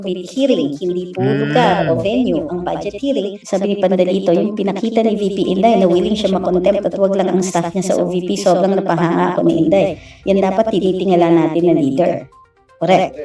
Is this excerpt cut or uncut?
cut